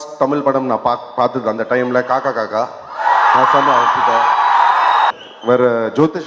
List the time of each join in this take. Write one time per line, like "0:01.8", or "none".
0:05.1